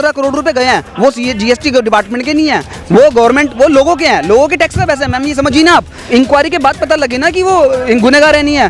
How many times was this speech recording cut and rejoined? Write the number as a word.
one